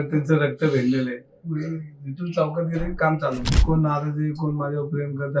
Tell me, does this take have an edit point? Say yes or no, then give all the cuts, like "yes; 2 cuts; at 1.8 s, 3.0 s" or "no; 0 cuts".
yes; 1 cut; at 3.6 s